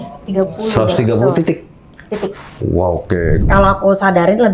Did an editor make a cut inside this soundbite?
yes; 1 cut; at 3.4 s

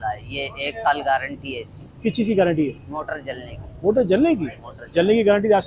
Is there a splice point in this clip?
no; 0 cuts

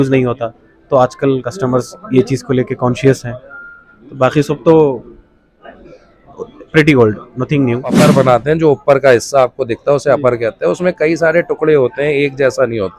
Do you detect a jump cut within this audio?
yes; 1 cut; at 8.0 s

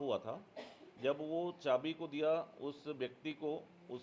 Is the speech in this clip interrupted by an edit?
no; 0 cuts

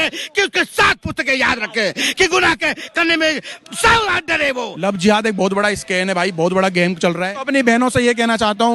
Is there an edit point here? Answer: yes; 2 cuts; at 4.7 s, 7.3 s

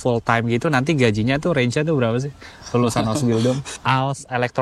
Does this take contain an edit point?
yes; 1 cut; at 3.7 s

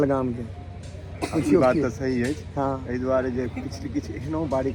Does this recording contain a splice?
no; 0 cuts

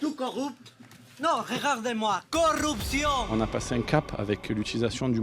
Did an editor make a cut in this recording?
yes; 1 cut; at 3.3 s

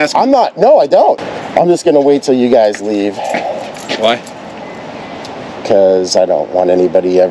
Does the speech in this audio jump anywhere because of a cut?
yes; 1 cut; at 1.2 s

